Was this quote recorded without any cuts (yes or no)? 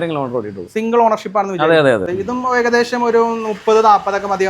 no